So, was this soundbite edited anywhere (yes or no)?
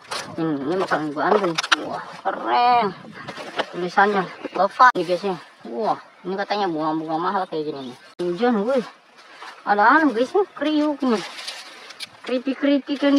yes